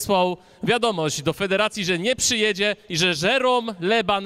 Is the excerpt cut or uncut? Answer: uncut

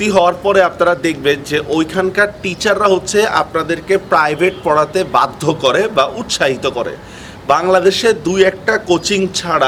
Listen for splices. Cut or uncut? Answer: uncut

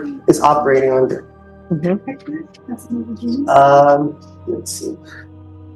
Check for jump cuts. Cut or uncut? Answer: uncut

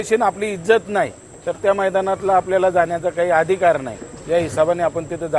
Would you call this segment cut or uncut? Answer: uncut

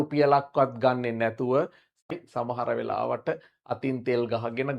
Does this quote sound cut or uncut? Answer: cut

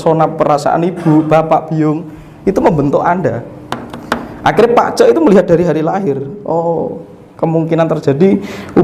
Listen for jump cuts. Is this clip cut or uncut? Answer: uncut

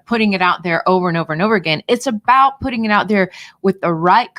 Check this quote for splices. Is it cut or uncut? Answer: uncut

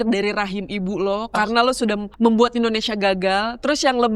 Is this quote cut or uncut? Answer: cut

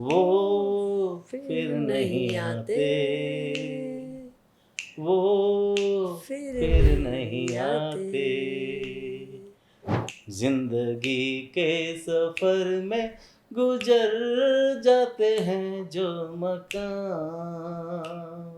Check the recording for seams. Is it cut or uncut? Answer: uncut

